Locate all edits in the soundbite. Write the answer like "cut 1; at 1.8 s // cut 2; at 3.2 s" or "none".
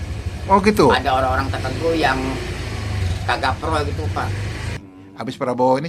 cut 1; at 4.8 s